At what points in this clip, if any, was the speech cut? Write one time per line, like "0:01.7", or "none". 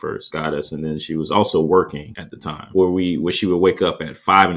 0:02.7